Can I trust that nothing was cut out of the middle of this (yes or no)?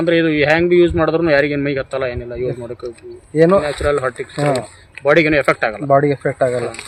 yes